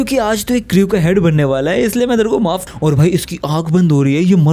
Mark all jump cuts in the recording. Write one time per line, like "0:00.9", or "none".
0:02.6